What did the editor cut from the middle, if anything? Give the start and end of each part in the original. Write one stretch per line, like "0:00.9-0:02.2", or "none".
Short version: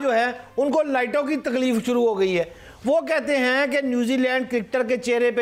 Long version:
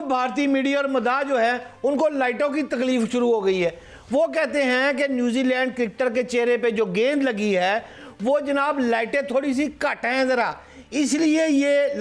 none